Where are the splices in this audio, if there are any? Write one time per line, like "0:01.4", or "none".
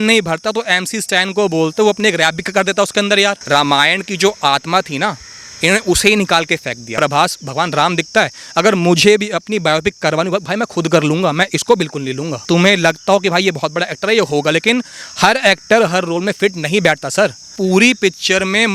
0:03.4
0:06.9
0:12.4
0:17.5

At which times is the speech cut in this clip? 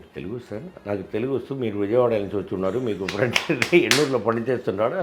none

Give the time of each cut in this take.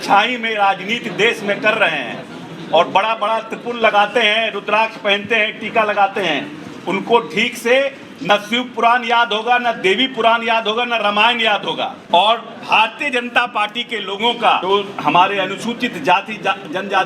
0:12.0
0:14.6

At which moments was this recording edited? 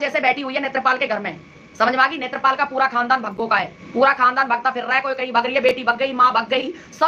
none

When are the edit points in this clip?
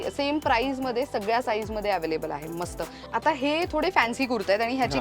none

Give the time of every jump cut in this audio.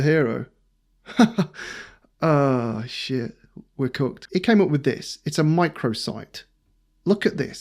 0:04.2

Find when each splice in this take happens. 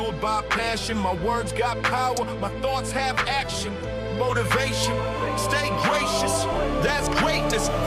none

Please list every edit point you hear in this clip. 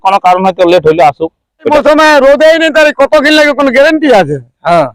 0:01.7

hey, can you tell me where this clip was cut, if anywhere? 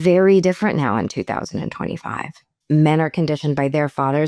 0:02.5

